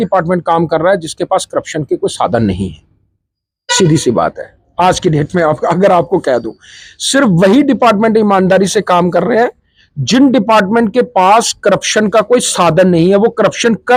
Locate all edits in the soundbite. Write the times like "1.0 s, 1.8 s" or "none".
none